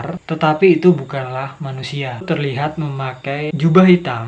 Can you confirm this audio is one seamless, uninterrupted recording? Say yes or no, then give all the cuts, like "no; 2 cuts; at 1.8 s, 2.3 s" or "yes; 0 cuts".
no; 2 cuts; at 2.2 s, 3.5 s